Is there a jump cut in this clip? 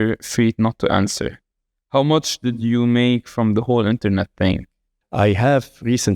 yes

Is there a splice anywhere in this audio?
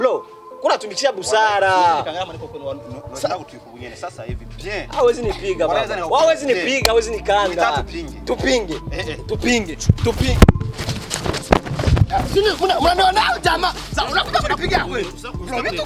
no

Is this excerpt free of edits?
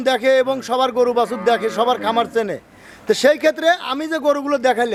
yes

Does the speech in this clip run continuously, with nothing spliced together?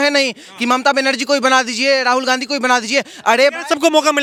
yes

